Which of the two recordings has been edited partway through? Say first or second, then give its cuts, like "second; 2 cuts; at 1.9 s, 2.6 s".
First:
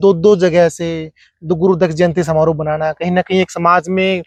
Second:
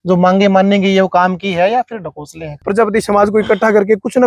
second; 1 cut; at 2.6 s